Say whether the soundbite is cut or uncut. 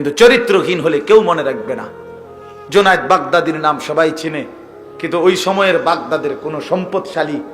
uncut